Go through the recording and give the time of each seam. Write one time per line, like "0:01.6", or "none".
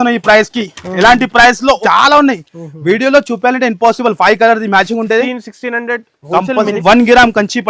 0:01.8
0:06.8

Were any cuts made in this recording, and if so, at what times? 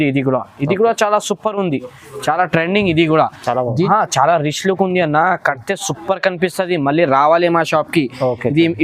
0:03.9

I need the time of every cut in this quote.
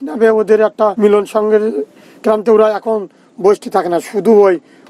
0:00.9

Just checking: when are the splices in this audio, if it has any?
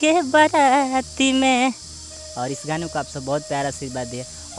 none

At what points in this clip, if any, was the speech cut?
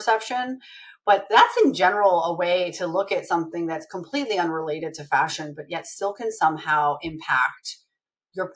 none

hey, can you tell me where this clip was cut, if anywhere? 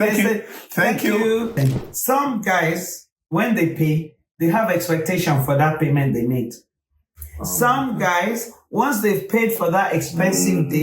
0:01.6

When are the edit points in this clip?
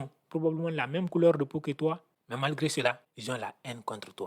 0:03.1

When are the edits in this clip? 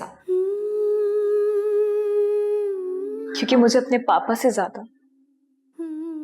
0:03.2

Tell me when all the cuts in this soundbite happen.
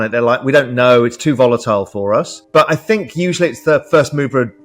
0:02.4

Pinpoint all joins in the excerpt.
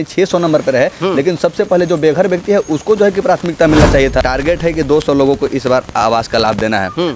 0:04.2

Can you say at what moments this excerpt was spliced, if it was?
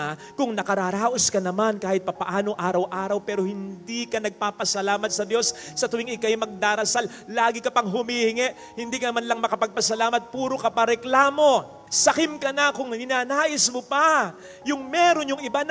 none

